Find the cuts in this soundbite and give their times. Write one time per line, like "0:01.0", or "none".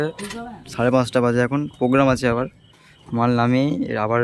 none